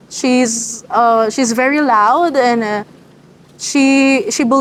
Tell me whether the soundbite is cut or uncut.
uncut